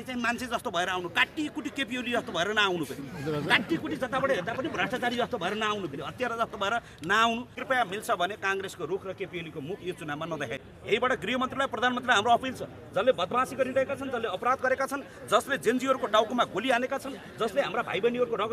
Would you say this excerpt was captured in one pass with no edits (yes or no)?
no